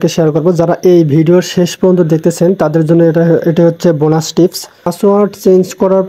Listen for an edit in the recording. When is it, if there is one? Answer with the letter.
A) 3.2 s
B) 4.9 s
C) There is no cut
B